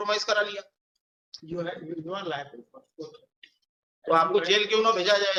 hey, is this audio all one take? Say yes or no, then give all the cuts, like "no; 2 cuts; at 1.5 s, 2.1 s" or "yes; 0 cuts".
yes; 0 cuts